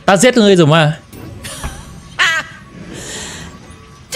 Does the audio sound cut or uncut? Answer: cut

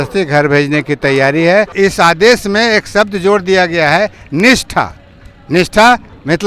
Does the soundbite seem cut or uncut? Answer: cut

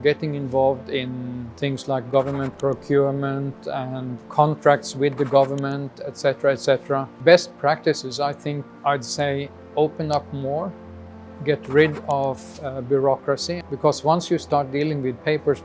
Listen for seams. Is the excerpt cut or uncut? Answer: cut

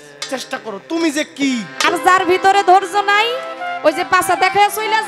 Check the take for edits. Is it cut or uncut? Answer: cut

